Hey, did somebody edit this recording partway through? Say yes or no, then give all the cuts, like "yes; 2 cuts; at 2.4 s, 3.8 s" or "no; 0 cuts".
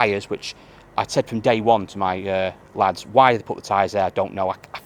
no; 0 cuts